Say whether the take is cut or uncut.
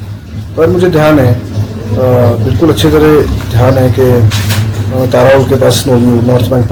uncut